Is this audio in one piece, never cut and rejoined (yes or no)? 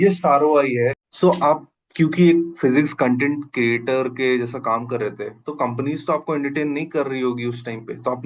no